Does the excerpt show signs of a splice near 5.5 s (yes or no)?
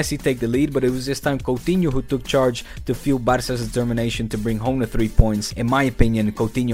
yes